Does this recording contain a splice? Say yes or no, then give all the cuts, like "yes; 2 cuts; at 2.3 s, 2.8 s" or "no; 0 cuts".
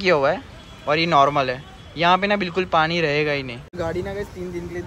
yes; 1 cut; at 3.8 s